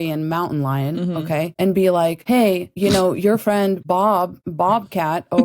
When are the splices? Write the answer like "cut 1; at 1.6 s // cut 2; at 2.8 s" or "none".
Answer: cut 1; at 1.5 s // cut 2; at 2.6 s // cut 3; at 4.0 s